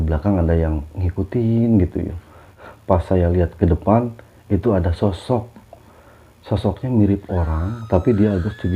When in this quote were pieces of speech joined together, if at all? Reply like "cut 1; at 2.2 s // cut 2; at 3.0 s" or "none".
cut 1; at 2.5 s // cut 2; at 4.2 s